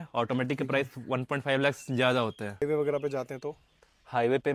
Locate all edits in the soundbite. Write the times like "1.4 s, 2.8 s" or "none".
2.6 s